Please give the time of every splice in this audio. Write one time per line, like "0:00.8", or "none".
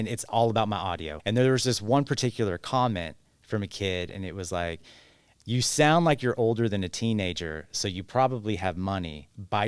0:01.1